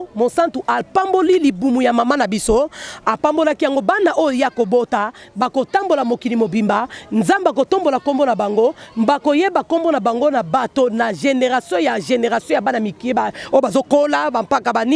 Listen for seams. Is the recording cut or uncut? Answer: uncut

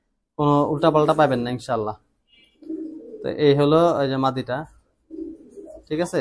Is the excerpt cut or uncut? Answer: uncut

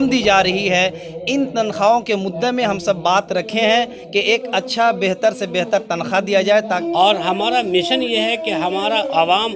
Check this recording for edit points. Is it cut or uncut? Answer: cut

